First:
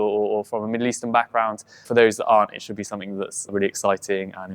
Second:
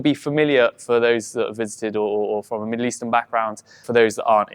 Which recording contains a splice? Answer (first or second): first